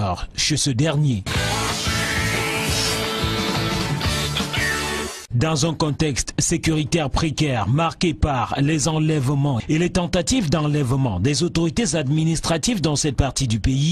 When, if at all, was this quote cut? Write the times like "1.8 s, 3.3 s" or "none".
none